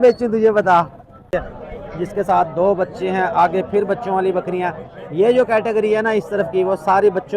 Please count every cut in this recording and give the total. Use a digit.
1